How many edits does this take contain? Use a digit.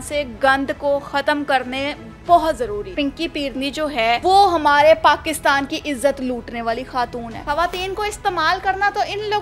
3